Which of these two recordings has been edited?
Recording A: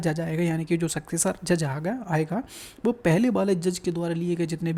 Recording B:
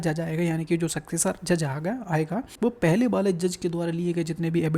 B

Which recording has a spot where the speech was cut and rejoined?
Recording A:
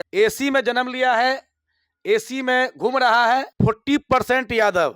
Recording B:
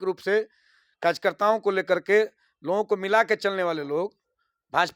A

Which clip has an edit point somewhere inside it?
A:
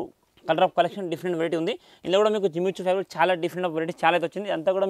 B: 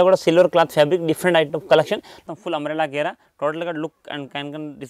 B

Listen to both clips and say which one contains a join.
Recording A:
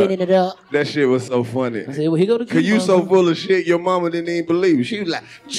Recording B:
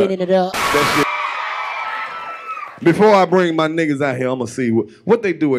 B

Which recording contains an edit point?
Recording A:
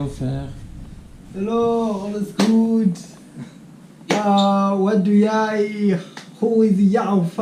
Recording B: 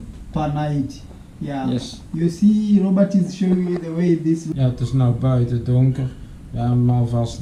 B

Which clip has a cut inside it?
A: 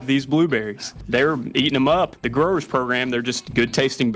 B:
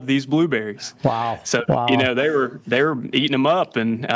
A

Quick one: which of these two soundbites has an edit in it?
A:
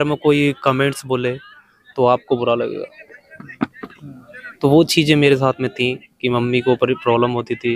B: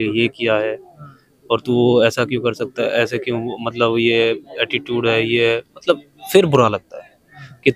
A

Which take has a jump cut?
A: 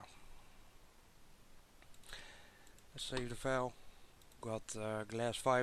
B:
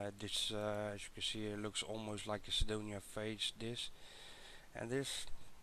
A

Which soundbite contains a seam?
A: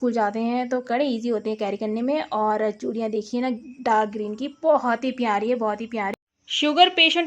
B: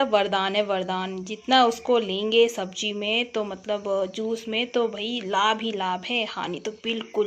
A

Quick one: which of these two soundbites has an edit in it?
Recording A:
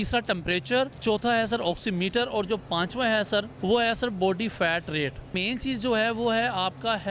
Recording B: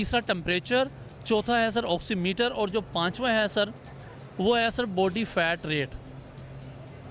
A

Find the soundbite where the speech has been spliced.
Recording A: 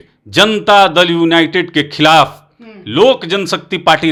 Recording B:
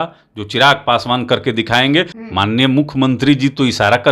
B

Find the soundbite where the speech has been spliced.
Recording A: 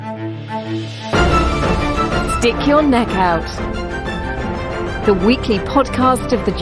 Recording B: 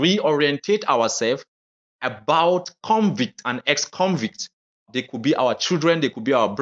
B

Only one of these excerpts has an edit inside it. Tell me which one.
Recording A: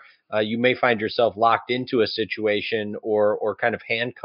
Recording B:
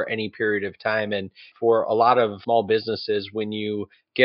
B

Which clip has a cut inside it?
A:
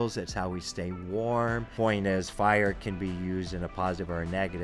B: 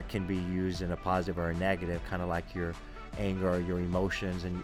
A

